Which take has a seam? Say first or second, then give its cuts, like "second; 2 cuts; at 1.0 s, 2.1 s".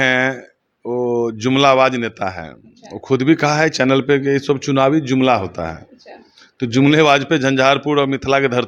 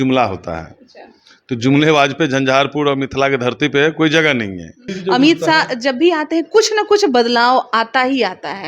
second; 1 cut; at 4.9 s